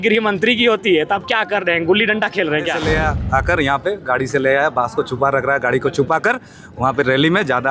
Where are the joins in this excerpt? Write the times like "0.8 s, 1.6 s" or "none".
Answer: 2.8 s